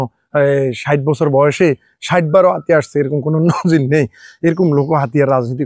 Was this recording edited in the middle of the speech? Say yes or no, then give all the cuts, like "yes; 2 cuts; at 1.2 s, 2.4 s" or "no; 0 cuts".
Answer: no; 0 cuts